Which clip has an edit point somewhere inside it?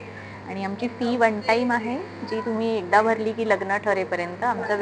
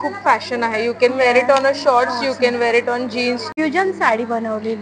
second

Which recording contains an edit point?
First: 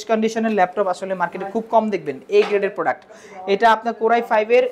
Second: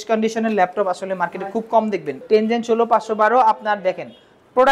second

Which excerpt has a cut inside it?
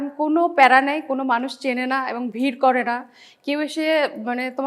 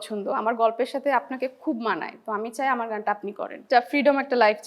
second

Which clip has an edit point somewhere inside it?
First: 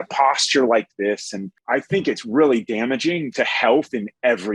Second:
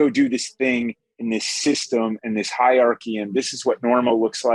first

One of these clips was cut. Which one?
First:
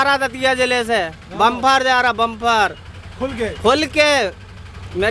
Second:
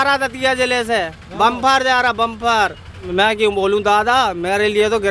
second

